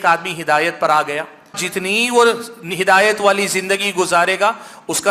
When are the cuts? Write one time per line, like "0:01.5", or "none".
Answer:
0:01.7